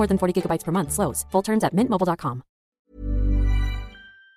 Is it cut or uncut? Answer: uncut